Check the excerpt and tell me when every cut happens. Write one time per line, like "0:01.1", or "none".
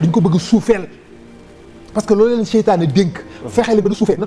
none